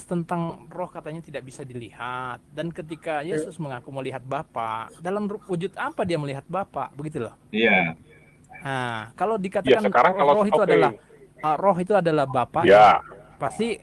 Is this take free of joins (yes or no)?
yes